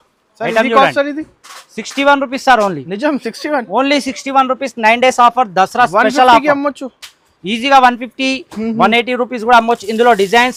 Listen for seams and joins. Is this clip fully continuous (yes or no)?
yes